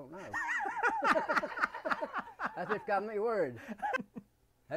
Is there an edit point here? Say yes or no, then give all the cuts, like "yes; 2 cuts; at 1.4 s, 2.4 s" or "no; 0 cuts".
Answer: yes; 2 cuts; at 2.5 s, 4.0 s